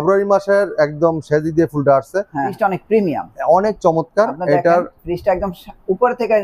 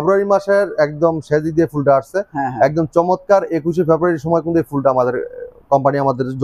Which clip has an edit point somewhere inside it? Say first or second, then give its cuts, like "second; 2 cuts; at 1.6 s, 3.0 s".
first; 1 cut; at 2.5 s